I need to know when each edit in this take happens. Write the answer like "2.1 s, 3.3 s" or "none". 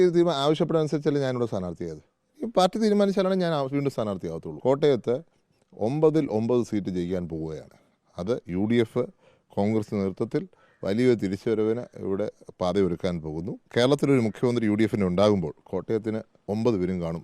4.5 s, 13.5 s